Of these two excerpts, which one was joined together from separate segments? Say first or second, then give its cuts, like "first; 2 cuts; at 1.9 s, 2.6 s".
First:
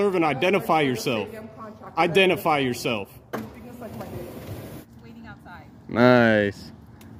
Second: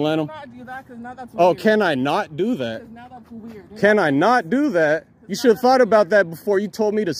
first; 1 cut; at 5.0 s